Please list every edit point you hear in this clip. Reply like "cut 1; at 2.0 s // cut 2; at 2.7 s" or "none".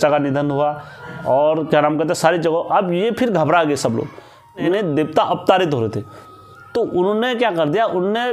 cut 1; at 4.7 s